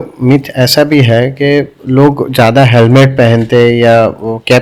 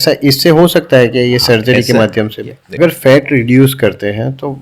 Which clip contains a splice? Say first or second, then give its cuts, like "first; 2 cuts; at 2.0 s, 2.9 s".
second; 1 cut; at 2.8 s